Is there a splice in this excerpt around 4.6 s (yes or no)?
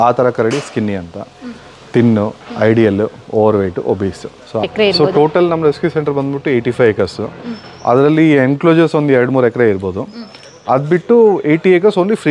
yes